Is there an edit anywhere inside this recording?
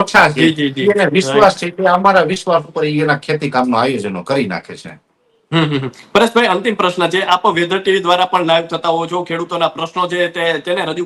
no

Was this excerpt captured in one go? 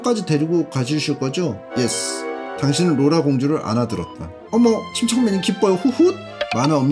yes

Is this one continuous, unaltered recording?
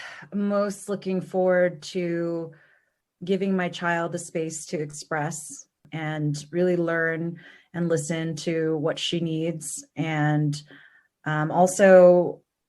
no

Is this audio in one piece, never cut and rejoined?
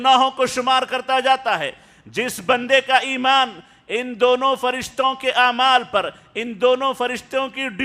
yes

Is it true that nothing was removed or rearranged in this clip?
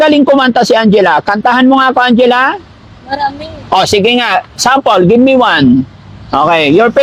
yes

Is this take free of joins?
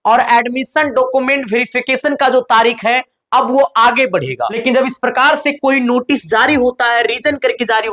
no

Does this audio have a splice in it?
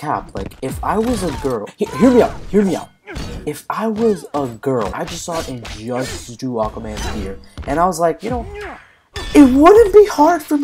yes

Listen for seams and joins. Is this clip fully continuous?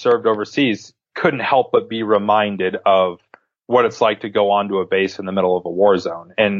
no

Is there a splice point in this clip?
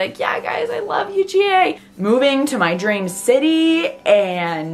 yes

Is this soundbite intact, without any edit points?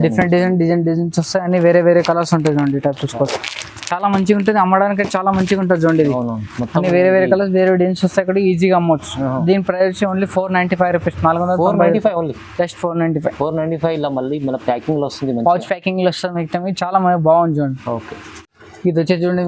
yes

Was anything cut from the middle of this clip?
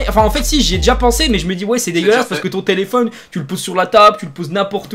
no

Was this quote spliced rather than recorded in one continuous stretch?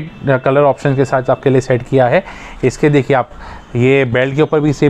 no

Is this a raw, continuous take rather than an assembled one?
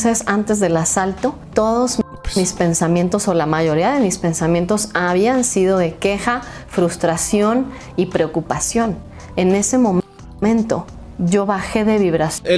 yes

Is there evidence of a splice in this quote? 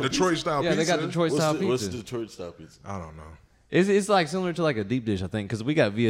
no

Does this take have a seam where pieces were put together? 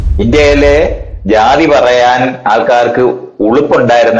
yes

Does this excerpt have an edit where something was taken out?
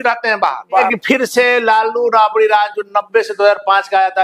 yes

